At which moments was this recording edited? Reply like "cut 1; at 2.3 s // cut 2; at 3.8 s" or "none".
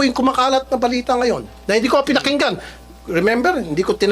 cut 1; at 1.8 s

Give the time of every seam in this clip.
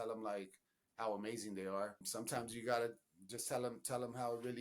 cut 1; at 2.0 s

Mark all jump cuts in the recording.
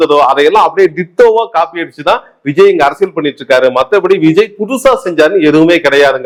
none

